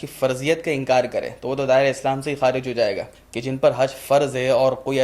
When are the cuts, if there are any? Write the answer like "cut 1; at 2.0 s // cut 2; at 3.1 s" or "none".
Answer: cut 1; at 3.1 s